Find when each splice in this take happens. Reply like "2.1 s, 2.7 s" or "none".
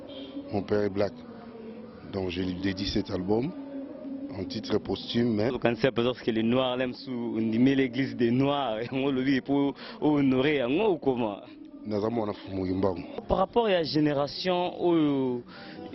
5.5 s, 13.2 s